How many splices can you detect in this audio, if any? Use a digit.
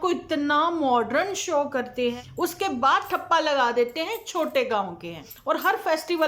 2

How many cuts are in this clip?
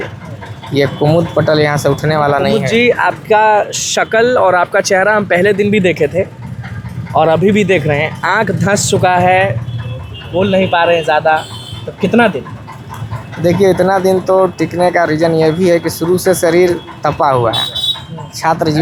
0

